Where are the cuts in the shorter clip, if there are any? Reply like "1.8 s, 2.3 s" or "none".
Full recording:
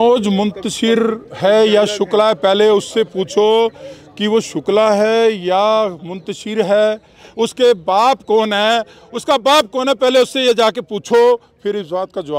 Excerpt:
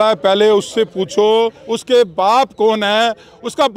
1.7 s